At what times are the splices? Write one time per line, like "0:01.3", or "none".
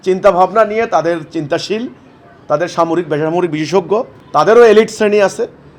0:04.2